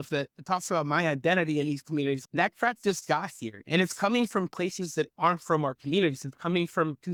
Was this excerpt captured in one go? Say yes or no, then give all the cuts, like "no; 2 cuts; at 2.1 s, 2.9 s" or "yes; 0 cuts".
yes; 0 cuts